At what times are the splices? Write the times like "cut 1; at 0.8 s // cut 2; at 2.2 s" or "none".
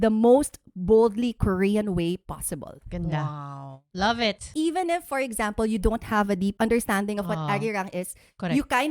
cut 1; at 4.5 s // cut 2; at 6.5 s